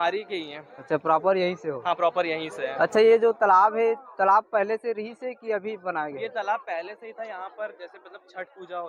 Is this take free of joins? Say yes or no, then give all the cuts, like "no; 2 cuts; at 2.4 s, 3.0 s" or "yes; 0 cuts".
yes; 0 cuts